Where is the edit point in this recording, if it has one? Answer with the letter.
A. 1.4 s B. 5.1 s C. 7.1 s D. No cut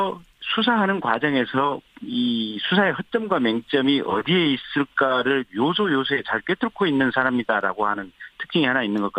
D